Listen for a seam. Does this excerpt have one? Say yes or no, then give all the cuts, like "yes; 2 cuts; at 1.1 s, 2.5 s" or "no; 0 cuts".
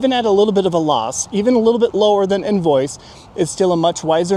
no; 0 cuts